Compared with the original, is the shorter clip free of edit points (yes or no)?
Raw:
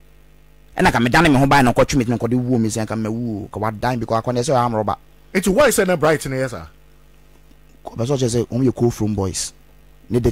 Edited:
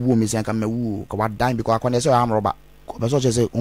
no